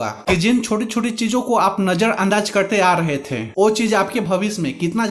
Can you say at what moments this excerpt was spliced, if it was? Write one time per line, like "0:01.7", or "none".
none